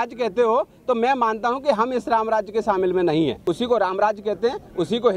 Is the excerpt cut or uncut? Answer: cut